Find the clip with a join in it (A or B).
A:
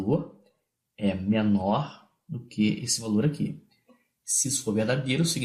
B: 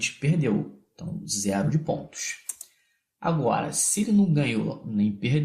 A